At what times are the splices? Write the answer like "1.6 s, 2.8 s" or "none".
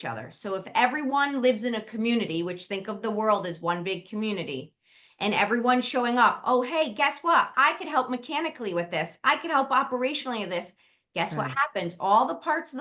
7.5 s